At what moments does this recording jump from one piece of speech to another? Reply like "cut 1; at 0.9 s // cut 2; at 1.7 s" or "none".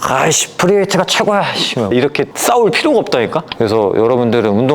cut 1; at 1.9 s // cut 2; at 3.5 s